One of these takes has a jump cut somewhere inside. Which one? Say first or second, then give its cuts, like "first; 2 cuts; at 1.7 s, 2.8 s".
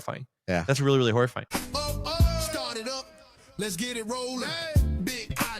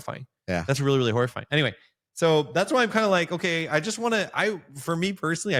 first; 1 cut; at 1.5 s